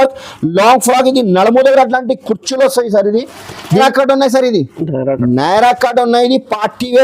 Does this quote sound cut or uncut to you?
cut